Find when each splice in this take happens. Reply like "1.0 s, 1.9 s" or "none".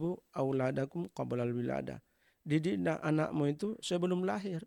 none

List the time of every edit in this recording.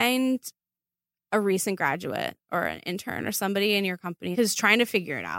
4.3 s

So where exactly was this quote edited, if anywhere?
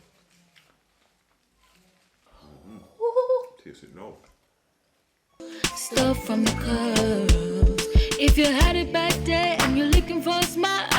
2.3 s, 5.4 s

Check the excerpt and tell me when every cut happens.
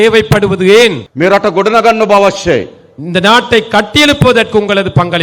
1.1 s

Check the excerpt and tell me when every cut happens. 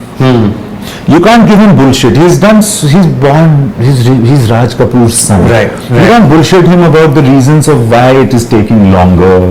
none

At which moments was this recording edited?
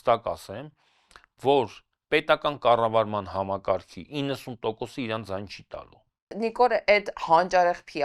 6.3 s

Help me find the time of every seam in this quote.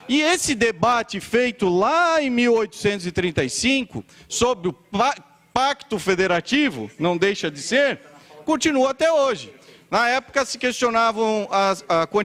none

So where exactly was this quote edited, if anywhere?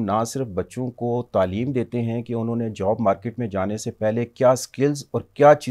none

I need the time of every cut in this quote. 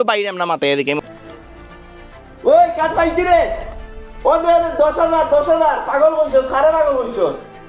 1.0 s

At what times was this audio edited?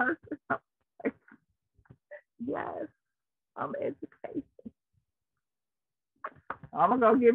none

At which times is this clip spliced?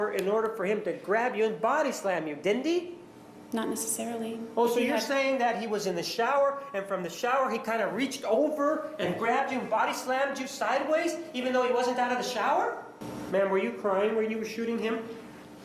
13.0 s

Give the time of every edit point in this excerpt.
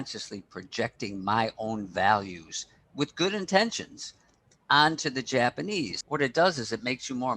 6.0 s

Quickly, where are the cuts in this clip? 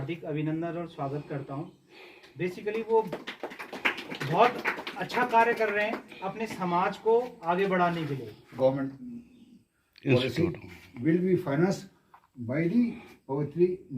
8.4 s

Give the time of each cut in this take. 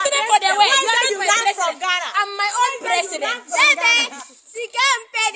none

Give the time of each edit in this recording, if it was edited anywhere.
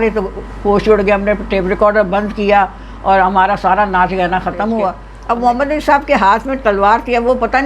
5.1 s

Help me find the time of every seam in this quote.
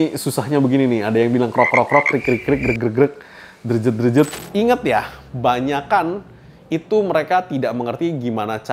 4.3 s

